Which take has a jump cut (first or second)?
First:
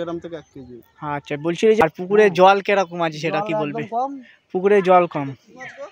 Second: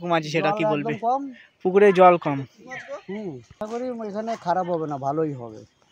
first